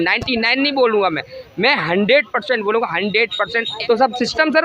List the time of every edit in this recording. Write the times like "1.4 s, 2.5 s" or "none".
3.7 s